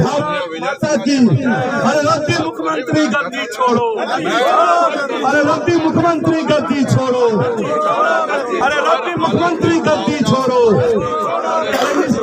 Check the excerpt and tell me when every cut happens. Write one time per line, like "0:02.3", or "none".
none